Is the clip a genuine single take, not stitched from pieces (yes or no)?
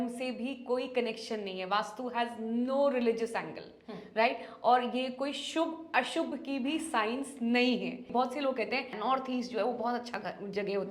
no